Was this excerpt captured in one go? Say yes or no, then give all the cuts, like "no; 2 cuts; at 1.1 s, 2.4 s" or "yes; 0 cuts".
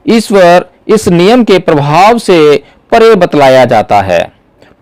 yes; 0 cuts